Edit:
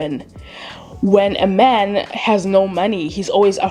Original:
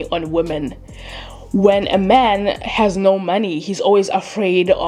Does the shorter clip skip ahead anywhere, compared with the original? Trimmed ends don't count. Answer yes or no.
no